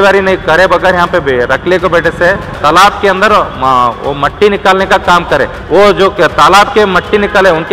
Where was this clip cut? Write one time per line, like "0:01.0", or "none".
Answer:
0:02.6
0:05.6

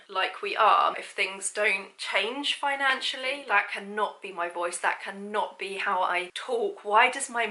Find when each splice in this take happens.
0:01.0
0:03.4

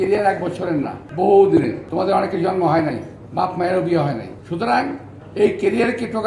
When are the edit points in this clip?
0:01.0
0:01.8
0:04.4

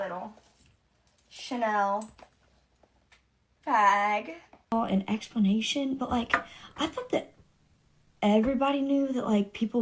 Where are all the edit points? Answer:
0:04.6

